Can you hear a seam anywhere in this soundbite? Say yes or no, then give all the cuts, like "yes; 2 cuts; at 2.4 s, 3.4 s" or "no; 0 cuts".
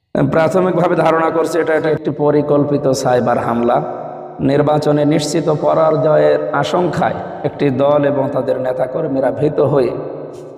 yes; 1 cut; at 1.9 s